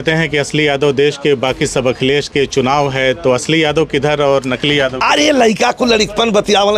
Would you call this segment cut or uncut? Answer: uncut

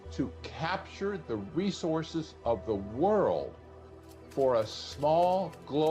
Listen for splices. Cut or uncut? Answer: uncut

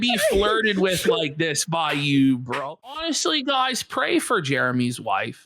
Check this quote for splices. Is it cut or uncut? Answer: cut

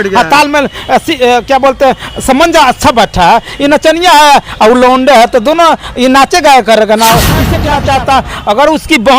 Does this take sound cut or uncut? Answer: cut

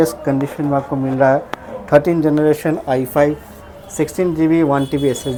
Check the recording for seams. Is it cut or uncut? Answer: uncut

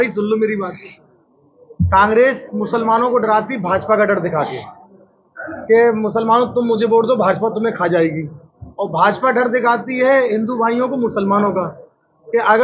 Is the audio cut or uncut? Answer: uncut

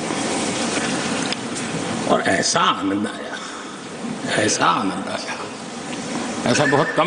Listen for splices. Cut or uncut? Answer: uncut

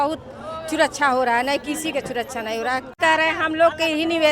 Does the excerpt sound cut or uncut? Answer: cut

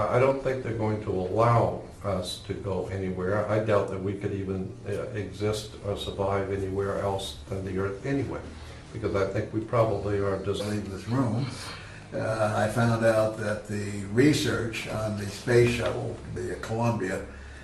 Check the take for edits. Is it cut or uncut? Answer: uncut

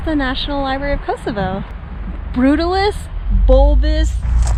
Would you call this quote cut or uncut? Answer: uncut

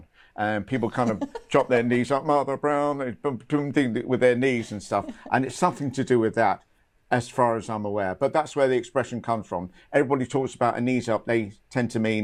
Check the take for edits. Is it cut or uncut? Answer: uncut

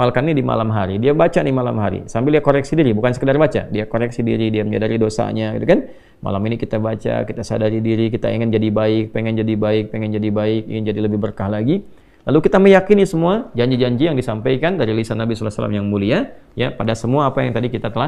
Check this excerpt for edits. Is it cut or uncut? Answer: uncut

